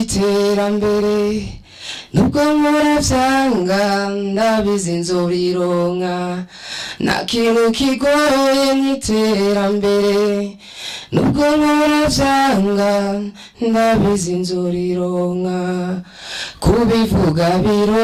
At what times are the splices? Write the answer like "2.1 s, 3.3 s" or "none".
none